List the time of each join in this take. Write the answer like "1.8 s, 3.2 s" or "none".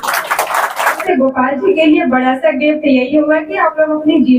1.0 s